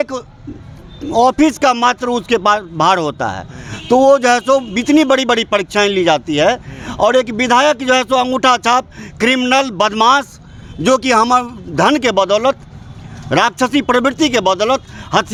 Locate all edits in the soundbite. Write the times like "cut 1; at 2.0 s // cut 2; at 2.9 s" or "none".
none